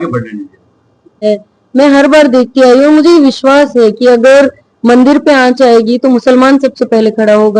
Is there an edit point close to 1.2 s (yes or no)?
yes